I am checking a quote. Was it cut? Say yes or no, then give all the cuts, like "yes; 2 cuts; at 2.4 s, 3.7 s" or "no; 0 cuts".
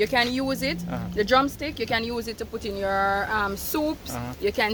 no; 0 cuts